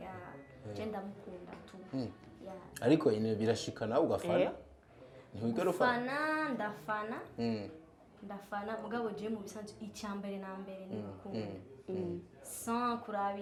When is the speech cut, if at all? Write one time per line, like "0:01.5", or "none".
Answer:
none